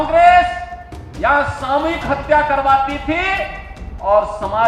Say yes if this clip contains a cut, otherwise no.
no